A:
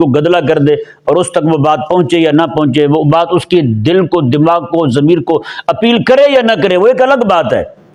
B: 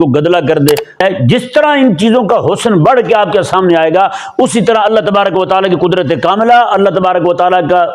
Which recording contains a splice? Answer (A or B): B